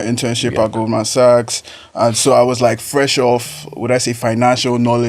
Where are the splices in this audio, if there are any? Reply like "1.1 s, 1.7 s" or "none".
none